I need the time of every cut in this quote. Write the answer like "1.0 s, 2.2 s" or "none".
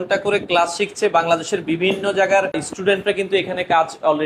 2.7 s